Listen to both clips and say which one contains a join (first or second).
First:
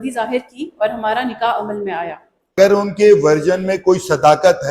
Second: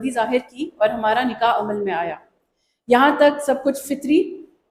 first